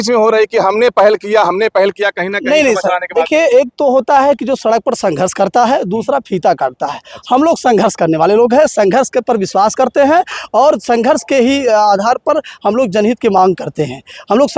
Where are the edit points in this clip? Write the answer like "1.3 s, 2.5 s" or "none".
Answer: none

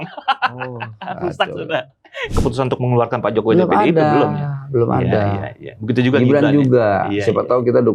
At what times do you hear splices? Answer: 2.3 s

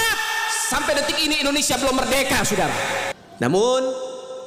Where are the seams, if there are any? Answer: 3.2 s

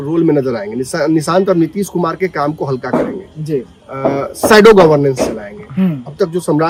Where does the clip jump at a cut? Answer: none

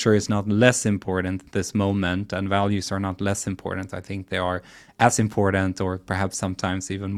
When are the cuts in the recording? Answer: none

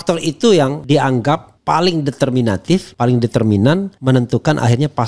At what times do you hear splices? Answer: 1.0 s, 2.9 s, 3.9 s

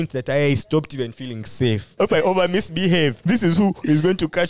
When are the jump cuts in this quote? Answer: 1.9 s, 3.2 s

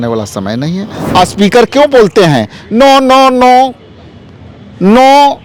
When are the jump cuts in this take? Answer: 1.0 s

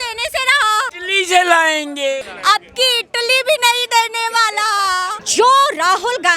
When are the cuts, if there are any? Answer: 1.0 s, 2.2 s, 5.2 s

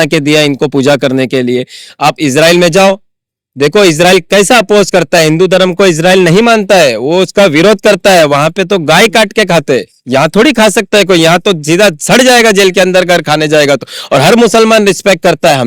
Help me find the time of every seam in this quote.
none

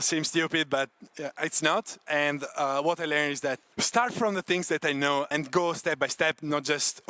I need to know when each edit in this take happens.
2.1 s, 3.7 s, 5.3 s

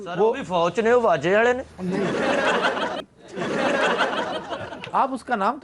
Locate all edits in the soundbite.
3.1 s

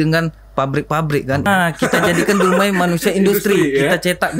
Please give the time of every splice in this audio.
1.5 s

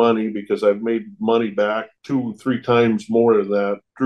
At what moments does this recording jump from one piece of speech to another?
none

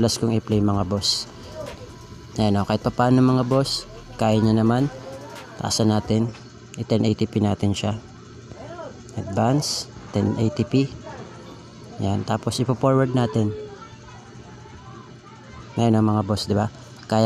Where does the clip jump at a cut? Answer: 1.5 s

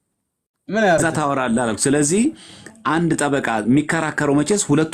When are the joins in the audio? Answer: 1.0 s

